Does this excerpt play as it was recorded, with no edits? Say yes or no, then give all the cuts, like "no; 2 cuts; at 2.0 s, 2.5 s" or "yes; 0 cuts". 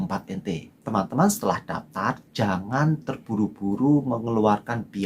no; 1 cut; at 0.9 s